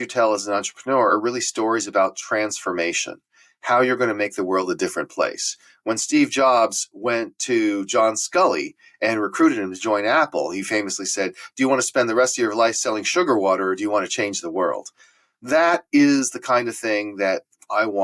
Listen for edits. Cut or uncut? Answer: uncut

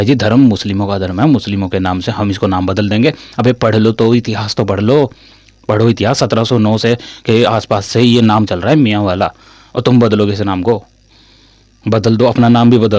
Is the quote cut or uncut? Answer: uncut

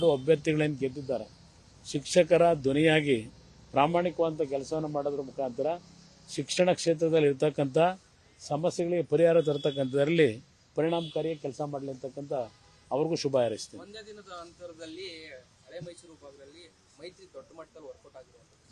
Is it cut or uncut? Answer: cut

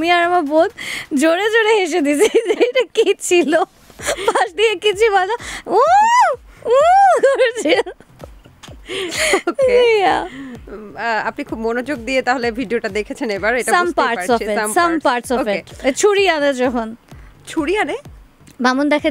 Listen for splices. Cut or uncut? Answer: uncut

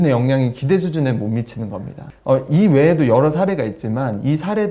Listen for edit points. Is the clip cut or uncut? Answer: uncut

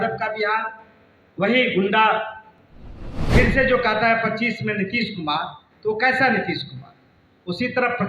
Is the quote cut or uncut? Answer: cut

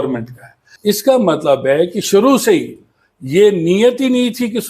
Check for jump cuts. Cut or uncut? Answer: cut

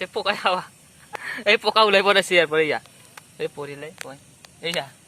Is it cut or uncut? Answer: cut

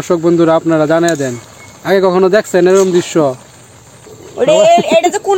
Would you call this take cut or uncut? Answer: cut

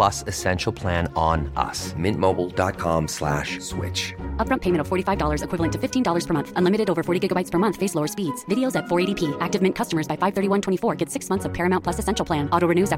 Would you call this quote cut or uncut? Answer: uncut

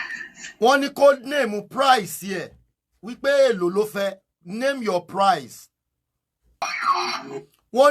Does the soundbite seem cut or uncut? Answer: cut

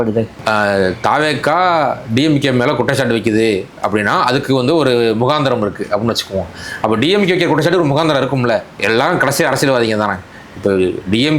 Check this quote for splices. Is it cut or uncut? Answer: uncut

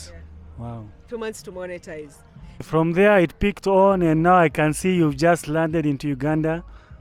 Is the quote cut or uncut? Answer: cut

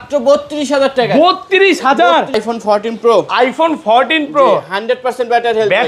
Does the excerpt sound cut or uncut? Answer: cut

